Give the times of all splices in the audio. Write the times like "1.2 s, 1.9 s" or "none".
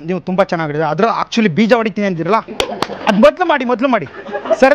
none